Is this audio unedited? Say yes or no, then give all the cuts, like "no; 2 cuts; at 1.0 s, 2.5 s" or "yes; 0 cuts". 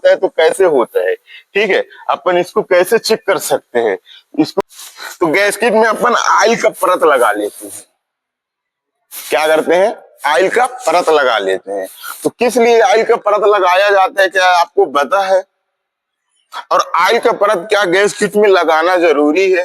no; 1 cut; at 4.6 s